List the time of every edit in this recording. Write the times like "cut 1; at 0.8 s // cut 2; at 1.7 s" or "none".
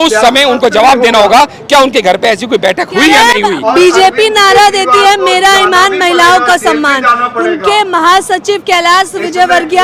none